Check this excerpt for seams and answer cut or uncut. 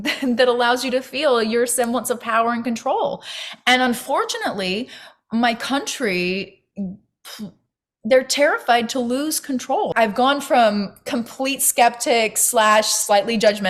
cut